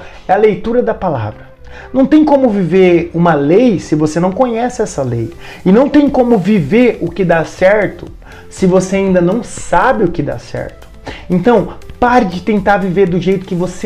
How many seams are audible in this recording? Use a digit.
0